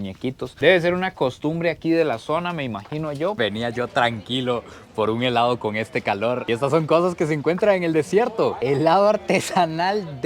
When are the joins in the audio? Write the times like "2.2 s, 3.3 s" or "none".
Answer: 3.4 s